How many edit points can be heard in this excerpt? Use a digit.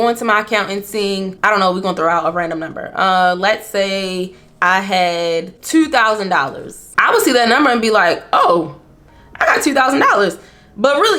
0